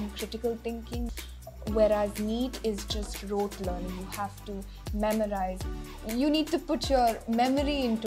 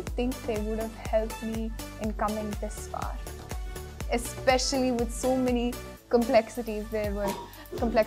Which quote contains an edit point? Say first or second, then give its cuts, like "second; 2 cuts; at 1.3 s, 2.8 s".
first; 2 cuts; at 1.1 s, 5.7 s